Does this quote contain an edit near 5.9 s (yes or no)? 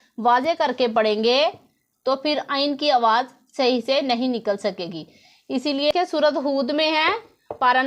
yes